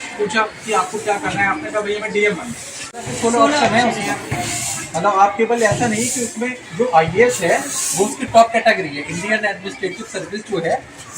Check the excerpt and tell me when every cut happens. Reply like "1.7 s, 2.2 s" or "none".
2.8 s

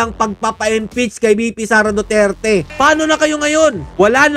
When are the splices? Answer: 2.7 s

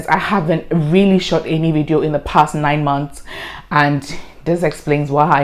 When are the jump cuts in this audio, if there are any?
none

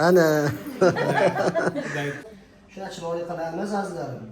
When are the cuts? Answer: 2.3 s

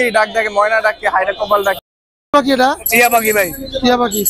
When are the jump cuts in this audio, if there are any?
1.8 s

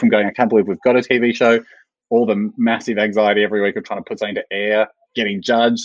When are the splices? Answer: none

